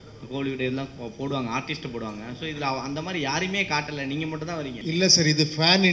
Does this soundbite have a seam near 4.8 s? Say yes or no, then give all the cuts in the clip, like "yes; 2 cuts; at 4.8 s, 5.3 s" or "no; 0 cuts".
yes; 1 cut; at 4.8 s